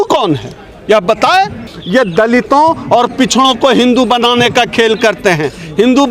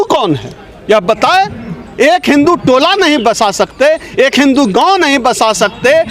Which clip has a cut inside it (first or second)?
first